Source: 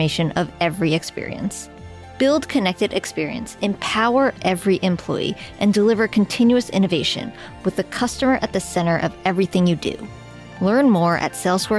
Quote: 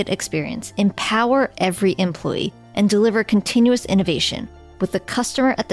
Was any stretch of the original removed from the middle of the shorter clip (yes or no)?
no